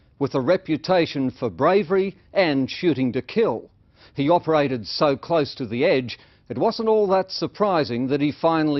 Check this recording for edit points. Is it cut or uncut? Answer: cut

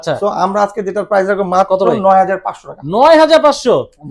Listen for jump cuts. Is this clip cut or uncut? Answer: uncut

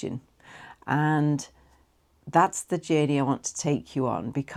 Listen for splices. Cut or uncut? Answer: uncut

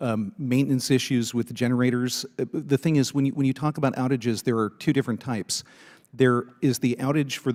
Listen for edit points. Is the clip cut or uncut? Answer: uncut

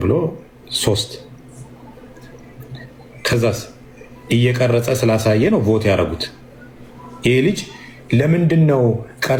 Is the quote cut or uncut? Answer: uncut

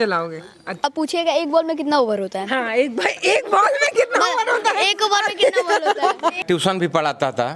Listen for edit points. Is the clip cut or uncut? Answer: cut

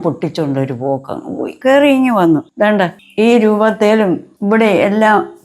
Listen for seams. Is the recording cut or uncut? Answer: cut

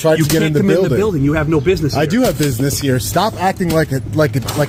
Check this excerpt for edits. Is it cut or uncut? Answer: uncut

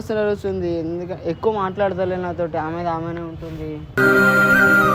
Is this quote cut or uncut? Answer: uncut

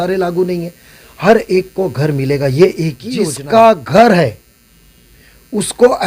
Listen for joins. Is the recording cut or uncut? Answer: cut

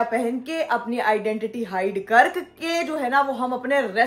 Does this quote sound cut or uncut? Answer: uncut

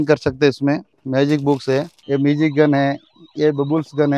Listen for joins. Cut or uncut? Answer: cut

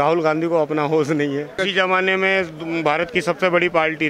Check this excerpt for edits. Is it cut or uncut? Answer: cut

